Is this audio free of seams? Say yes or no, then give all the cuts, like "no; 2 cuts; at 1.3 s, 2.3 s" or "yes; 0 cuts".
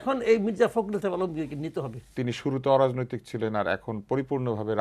no; 1 cut; at 2.1 s